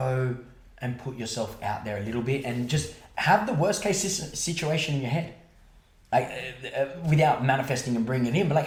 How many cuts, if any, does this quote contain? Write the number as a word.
zero